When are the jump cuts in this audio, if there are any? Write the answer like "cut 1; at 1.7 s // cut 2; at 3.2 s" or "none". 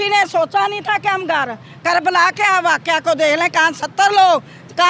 none